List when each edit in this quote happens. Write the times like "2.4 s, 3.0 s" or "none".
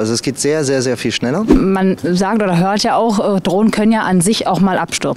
1.5 s